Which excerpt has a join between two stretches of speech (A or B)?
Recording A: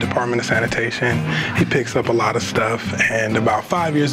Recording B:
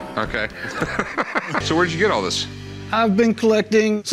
B